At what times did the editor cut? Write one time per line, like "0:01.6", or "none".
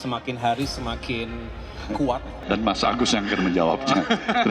0:02.4